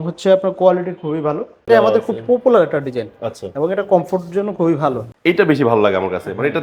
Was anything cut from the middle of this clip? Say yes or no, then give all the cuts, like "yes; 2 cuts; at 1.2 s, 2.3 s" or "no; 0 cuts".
yes; 2 cuts; at 1.7 s, 5.1 s